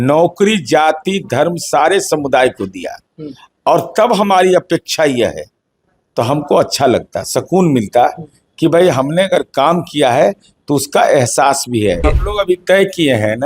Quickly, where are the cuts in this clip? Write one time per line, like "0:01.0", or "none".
0:12.0